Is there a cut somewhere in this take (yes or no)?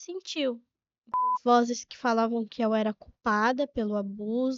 yes